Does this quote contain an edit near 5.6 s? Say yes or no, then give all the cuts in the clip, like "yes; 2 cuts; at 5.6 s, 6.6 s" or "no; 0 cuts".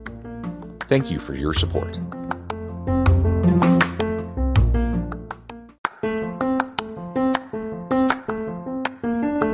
yes; 1 cut; at 5.6 s